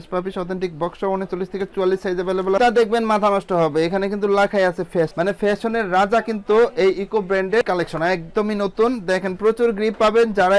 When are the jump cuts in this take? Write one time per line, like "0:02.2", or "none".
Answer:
0:02.6
0:07.6